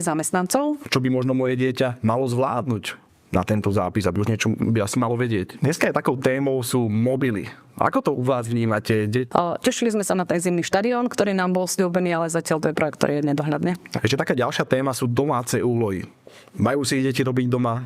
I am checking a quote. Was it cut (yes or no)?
yes